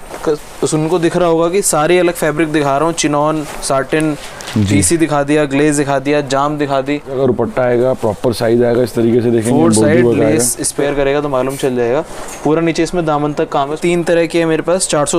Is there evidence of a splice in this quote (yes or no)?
yes